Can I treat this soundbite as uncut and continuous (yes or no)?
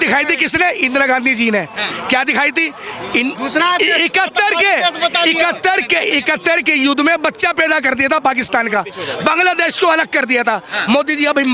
yes